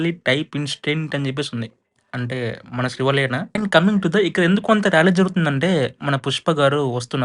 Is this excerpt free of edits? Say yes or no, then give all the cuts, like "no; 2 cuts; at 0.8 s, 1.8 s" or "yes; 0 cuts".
no; 1 cut; at 3.6 s